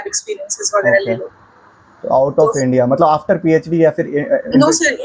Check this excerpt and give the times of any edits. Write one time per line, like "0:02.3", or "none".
none